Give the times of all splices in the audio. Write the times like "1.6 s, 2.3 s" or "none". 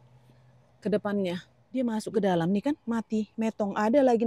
1.6 s